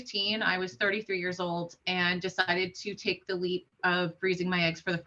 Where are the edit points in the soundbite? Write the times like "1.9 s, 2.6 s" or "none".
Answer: none